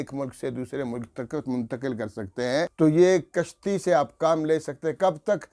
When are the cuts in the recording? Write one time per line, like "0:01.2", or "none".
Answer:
0:02.7

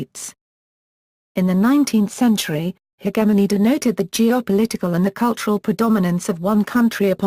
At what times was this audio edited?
0:06.4

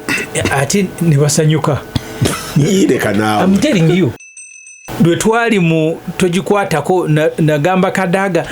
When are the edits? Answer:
0:04.3

